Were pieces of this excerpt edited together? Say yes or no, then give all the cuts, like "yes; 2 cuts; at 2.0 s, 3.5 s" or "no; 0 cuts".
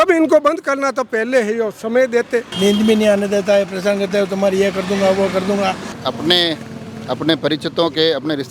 yes; 2 cuts; at 2.5 s, 5.9 s